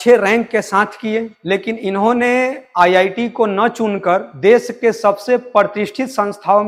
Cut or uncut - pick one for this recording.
uncut